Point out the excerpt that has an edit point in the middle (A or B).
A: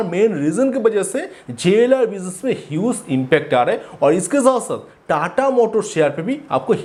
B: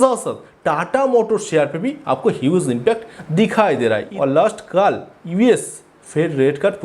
B